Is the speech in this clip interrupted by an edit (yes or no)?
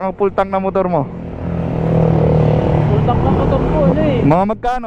no